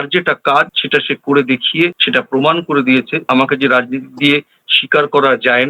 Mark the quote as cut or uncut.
cut